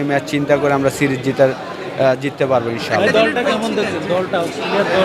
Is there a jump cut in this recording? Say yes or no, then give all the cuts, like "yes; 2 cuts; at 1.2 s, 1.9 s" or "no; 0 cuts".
no; 0 cuts